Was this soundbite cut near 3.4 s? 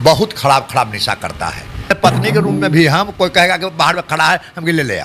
no; 1 cut; at 2.0 s

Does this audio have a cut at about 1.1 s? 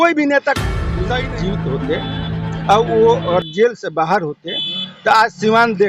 yes; 1 cut; at 1.1 s

